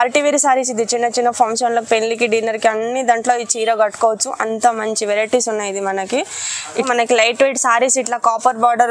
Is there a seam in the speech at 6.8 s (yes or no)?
yes